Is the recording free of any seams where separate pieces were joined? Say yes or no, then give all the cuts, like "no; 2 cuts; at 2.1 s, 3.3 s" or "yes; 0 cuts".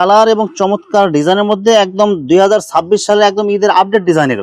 yes; 0 cuts